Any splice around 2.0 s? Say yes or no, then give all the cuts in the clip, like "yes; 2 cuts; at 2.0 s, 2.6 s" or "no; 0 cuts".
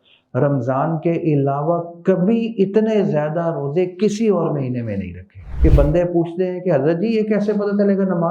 no; 1 cut; at 5.5 s